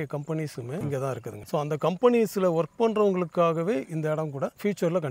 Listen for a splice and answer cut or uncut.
cut